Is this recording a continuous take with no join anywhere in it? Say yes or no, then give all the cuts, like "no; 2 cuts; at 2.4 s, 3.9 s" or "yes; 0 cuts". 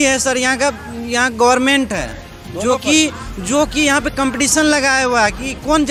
yes; 0 cuts